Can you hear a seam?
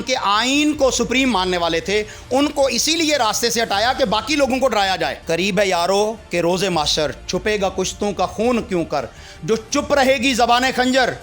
yes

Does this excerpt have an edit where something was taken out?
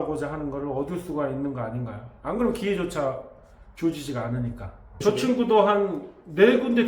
yes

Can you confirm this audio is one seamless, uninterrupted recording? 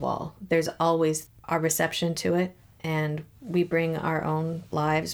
yes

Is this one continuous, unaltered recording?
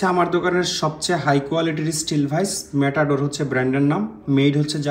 yes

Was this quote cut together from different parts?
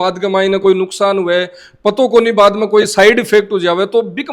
no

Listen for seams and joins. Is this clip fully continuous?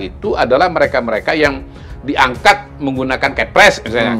yes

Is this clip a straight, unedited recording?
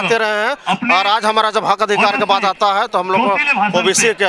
yes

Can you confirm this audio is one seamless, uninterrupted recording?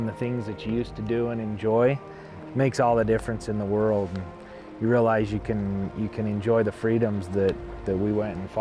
yes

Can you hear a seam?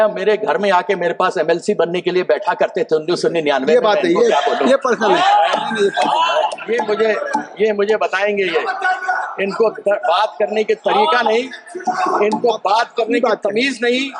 yes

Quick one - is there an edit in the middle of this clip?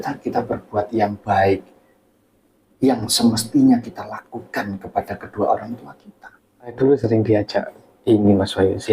yes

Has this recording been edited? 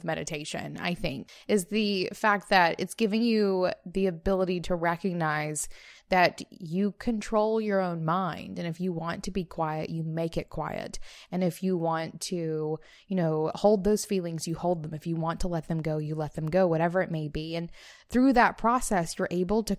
yes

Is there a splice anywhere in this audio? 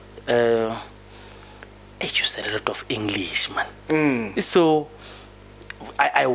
no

